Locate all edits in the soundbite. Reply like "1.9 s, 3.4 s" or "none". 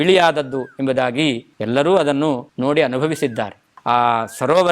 1.5 s, 2.5 s

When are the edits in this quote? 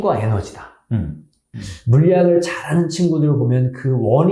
1.6 s

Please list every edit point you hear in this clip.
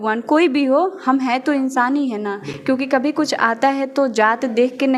none

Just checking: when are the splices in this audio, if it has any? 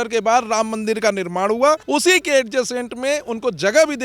1.8 s

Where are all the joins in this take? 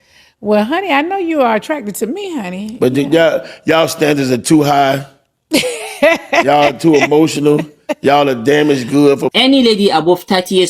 9.3 s

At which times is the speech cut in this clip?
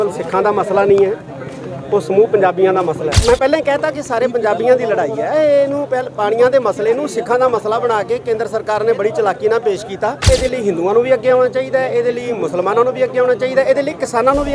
3.2 s, 10.3 s

